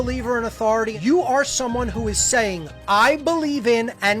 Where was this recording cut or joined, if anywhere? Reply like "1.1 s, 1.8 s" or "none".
0.9 s